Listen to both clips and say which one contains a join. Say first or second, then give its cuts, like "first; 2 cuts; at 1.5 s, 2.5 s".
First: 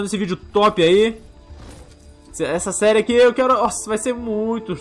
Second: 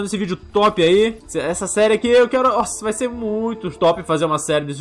second; 2 cuts; at 1.2 s, 3.7 s